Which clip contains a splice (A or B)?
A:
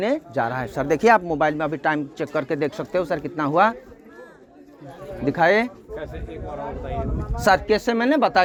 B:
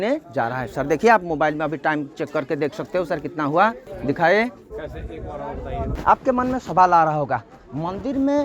B